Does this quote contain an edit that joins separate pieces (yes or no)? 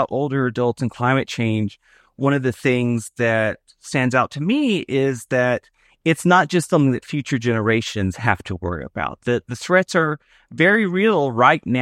no